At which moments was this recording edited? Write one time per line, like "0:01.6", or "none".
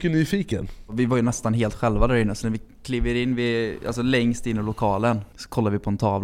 0:00.9
0:05.4